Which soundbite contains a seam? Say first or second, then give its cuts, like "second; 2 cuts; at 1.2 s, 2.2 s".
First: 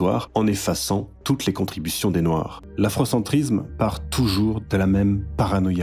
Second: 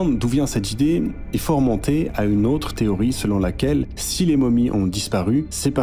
first; 1 cut; at 2.6 s